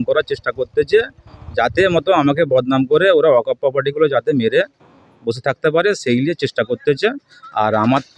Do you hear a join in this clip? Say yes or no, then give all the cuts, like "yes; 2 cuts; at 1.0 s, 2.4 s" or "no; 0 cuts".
no; 0 cuts